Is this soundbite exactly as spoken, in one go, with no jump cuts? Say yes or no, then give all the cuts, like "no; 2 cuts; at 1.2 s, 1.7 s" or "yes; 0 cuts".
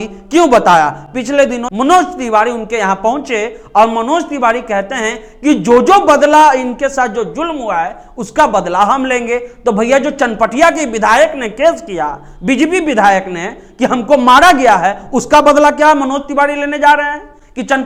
yes; 0 cuts